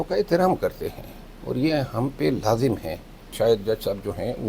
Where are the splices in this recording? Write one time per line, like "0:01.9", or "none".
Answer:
0:03.2